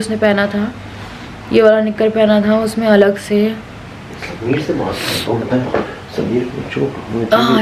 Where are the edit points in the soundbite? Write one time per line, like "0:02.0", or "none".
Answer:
none